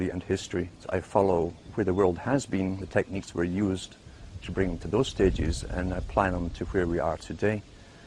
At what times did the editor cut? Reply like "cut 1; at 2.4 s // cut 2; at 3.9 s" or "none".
none